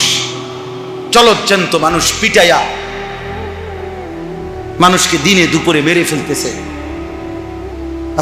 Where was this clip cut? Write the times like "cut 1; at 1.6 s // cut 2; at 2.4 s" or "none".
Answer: none